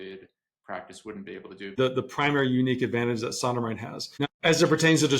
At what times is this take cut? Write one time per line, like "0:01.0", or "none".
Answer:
0:01.8
0:04.2